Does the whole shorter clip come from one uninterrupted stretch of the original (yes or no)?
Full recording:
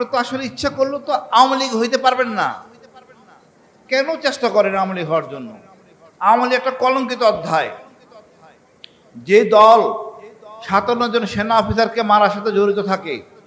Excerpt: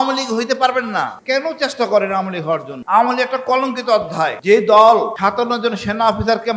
no